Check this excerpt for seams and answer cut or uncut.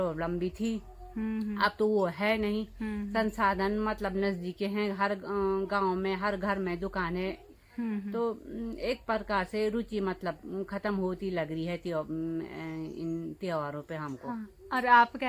uncut